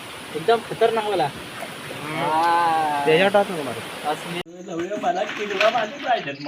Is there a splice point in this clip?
yes; 1 cut; at 4.4 s

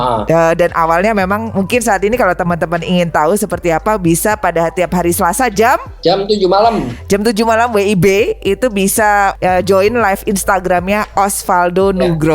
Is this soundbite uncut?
no; 2 cuts; at 5.9 s, 9.4 s

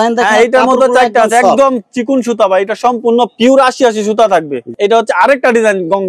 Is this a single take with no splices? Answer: no; 1 cut; at 4.6 s

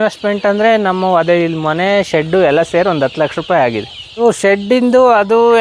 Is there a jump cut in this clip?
no; 0 cuts

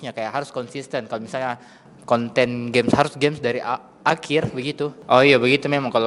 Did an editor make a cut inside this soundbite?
yes; 1 cut; at 5.0 s

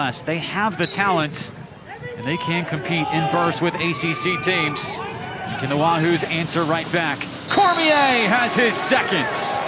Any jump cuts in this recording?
no; 0 cuts

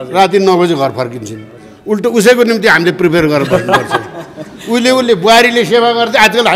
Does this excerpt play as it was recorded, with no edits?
yes; 0 cuts

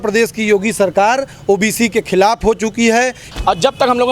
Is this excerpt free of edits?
no; 1 cut; at 3.2 s

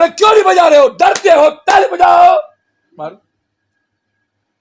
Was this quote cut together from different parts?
no; 0 cuts

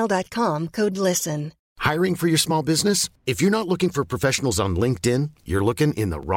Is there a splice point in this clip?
yes; 1 cut; at 1.6 s

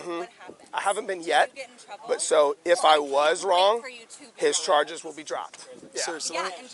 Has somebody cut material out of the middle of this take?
no; 0 cuts

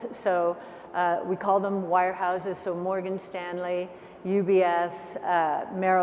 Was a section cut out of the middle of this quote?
no; 0 cuts

